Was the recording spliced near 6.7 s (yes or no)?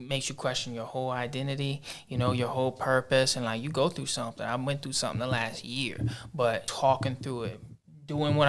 yes